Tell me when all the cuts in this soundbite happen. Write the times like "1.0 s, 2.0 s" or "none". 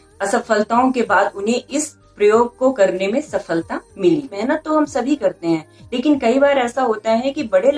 4.4 s